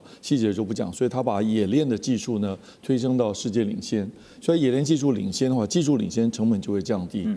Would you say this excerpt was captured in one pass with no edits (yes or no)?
yes